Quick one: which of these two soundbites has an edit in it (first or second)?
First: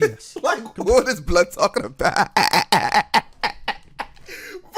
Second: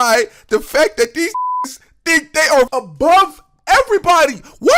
second